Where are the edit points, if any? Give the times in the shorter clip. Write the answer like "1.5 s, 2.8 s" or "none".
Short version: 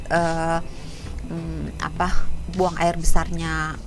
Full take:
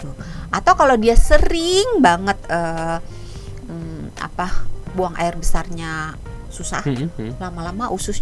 none